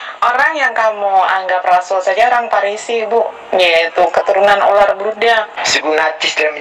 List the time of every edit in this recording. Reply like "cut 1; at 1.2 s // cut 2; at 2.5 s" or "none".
cut 1; at 5.6 s